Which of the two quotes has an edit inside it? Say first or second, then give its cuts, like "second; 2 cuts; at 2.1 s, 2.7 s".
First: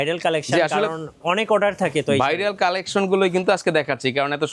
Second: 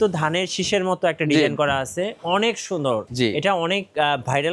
second; 1 cut; at 3.1 s